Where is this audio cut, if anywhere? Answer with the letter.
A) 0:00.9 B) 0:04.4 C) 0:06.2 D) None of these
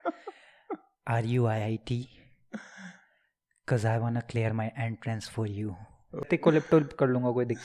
C